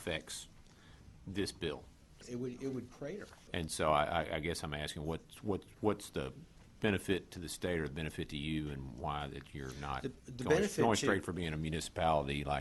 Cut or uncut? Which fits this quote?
cut